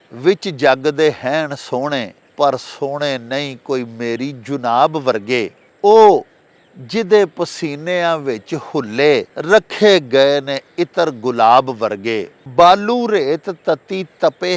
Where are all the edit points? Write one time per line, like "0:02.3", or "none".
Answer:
0:02.2
0:05.6
0:09.3
0:12.3